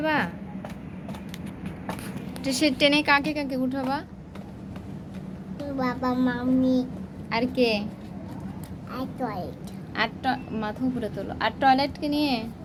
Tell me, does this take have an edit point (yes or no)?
no